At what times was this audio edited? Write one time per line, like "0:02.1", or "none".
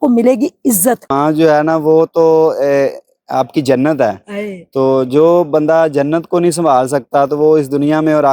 0:01.1